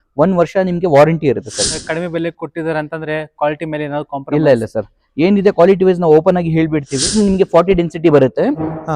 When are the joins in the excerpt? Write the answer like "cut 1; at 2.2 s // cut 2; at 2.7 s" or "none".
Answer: cut 1; at 1.8 s // cut 2; at 7.2 s